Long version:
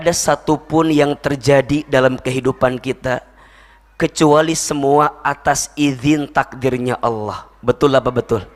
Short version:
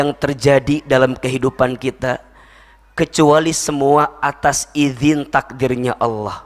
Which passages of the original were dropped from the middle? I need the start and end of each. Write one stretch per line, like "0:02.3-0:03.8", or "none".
none